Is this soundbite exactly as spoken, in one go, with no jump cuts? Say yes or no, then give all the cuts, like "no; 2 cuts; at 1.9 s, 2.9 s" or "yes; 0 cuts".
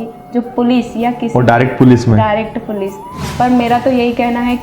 no; 1 cut; at 3.2 s